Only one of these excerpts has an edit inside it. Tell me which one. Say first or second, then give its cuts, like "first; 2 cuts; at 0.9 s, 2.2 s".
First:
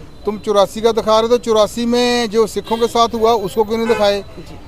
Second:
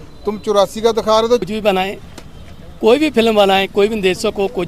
second; 1 cut; at 1.4 s